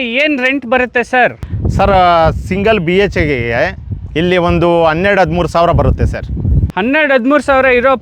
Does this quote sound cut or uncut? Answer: uncut